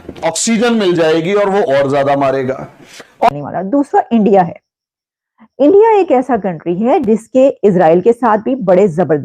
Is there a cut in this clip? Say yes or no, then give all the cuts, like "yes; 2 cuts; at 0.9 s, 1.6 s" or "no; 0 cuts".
yes; 1 cut; at 3.3 s